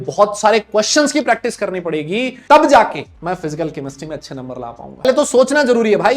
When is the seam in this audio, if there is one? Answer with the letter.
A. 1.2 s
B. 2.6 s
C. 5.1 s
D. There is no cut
C